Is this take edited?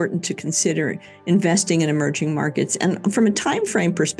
no; 0 cuts

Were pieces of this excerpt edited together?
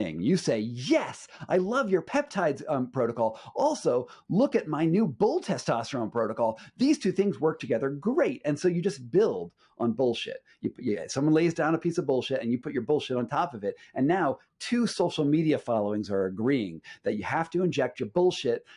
no; 0 cuts

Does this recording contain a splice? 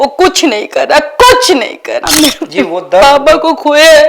yes; 1 cut; at 2.0 s

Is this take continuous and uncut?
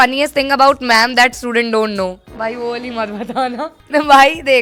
yes; 0 cuts

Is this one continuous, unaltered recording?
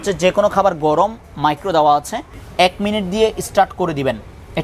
no; 1 cut; at 2.4 s

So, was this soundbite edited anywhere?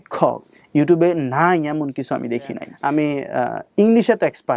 yes; 1 cut; at 2.7 s

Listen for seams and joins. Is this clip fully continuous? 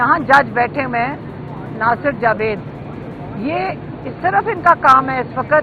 yes; 0 cuts

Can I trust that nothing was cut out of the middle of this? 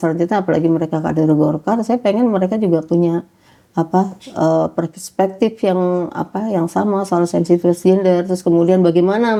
yes; 0 cuts

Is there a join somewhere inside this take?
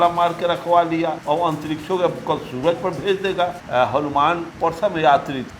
yes; 2 cuts; at 1.2 s, 3.6 s

